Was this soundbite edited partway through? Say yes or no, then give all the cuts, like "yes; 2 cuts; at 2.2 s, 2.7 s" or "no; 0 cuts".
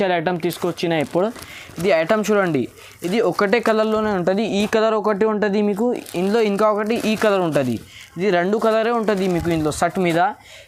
no; 0 cuts